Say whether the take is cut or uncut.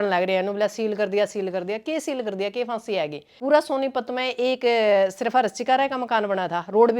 cut